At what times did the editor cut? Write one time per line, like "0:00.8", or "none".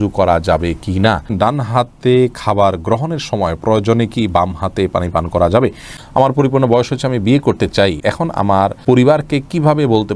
0:01.3
0:05.9
0:08.4